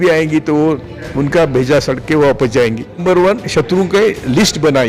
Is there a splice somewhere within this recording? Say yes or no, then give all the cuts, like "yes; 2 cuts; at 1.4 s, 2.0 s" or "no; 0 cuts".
yes; 1 cut; at 3.0 s